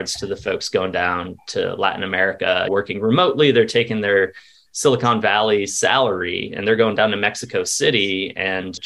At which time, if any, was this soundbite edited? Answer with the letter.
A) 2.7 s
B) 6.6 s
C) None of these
A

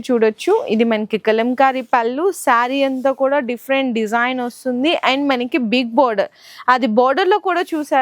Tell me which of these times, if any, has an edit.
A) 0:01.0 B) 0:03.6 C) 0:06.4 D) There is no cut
D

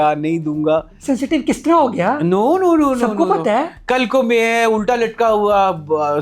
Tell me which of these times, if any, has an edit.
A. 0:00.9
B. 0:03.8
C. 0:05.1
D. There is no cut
A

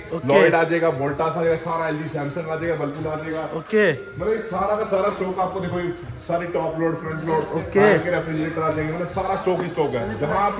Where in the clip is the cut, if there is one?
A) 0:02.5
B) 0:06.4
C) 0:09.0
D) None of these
D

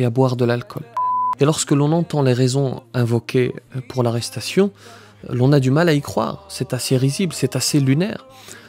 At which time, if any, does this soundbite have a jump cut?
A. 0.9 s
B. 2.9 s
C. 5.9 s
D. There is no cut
A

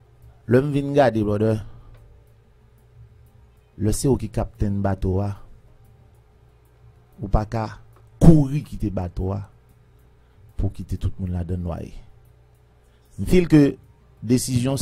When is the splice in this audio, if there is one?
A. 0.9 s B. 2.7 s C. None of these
C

